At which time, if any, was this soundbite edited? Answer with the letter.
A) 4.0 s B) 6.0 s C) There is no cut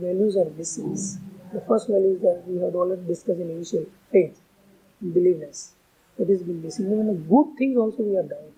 C